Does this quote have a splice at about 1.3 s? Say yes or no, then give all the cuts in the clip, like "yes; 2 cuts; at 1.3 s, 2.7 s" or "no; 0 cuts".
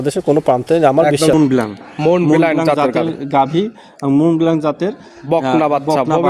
yes; 1 cut; at 1.3 s